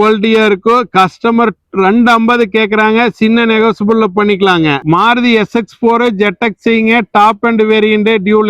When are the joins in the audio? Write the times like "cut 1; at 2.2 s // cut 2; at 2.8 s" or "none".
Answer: cut 1; at 4.8 s